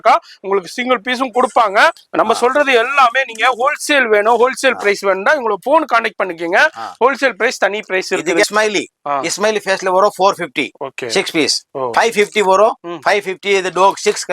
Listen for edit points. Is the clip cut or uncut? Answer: cut